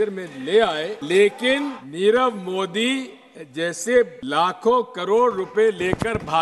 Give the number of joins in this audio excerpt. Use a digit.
3